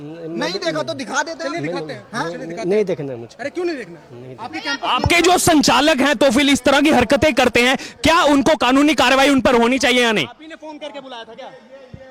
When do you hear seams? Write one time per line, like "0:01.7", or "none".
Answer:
none